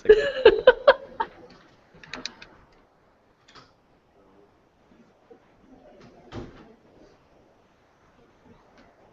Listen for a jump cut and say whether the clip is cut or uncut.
cut